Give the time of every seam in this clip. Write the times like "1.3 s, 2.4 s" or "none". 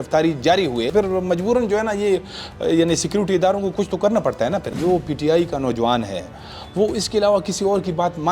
0.9 s, 4.7 s